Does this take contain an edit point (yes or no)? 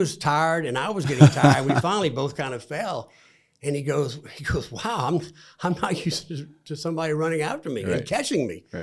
no